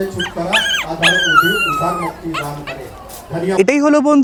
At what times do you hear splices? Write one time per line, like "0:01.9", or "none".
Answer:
none